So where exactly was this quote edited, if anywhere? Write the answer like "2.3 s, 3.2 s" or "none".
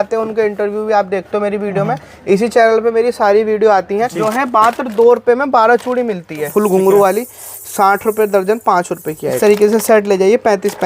4.1 s, 6.4 s, 9.4 s